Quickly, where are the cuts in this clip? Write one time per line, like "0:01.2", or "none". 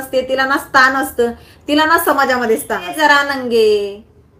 0:02.9